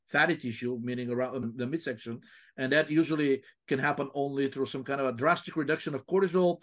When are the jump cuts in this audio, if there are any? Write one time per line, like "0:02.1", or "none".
0:01.4